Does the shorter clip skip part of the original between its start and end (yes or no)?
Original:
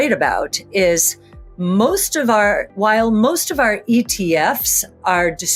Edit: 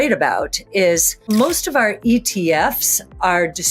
yes